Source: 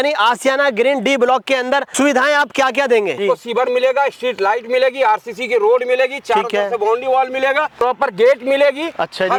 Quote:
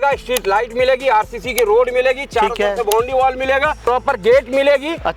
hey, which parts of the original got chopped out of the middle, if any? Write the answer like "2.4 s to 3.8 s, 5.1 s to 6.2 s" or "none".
none